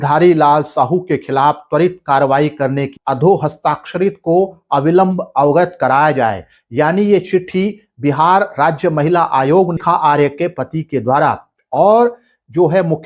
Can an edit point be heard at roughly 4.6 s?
no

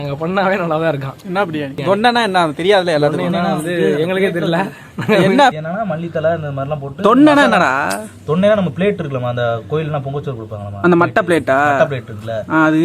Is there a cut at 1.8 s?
yes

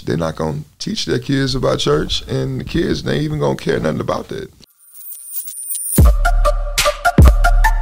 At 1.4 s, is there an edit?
no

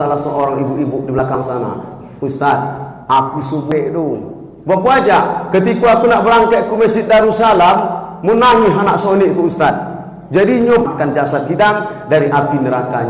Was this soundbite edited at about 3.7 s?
yes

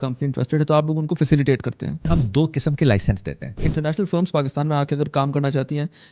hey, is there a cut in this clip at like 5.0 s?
no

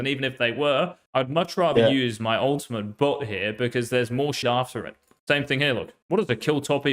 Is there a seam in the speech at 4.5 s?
yes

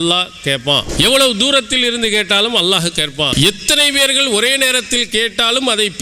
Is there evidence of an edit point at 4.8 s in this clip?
no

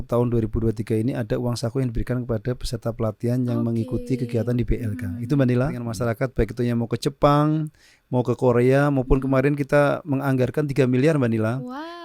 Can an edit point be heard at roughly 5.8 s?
yes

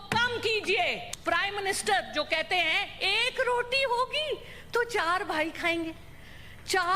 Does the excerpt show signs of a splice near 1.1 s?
yes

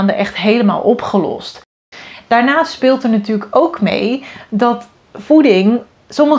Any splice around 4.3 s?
no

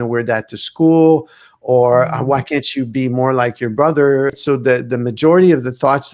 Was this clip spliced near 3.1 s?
no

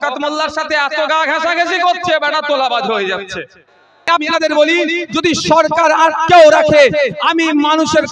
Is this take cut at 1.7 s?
no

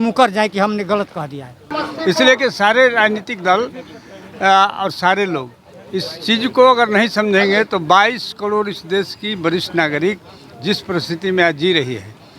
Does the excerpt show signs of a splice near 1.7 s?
yes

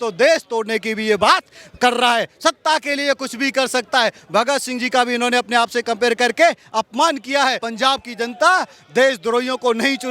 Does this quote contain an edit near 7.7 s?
yes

